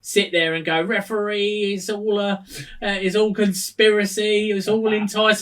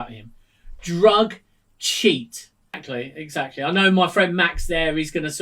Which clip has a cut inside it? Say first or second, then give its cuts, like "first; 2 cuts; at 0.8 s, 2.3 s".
second; 1 cut; at 2.8 s